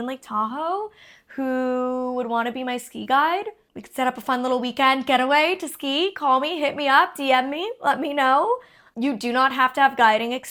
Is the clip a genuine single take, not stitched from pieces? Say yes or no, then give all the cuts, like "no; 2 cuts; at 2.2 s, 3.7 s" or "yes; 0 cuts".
yes; 0 cuts